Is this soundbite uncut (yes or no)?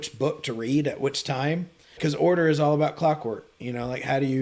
no